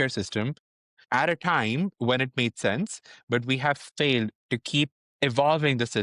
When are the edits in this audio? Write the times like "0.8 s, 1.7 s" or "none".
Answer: 1.0 s